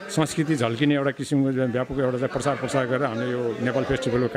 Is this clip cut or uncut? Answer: uncut